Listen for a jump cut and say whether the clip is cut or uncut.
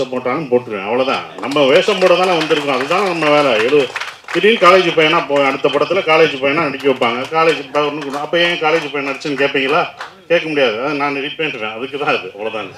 uncut